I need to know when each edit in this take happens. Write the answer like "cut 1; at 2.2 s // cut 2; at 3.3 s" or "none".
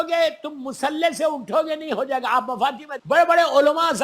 cut 1; at 2.9 s